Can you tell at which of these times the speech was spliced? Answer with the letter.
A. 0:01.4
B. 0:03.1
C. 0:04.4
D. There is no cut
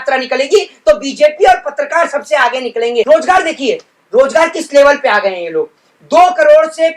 B